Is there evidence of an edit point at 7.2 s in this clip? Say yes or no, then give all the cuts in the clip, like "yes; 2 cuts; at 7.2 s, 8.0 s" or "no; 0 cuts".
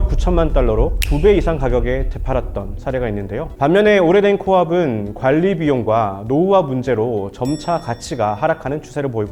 no; 1 cut; at 3.4 s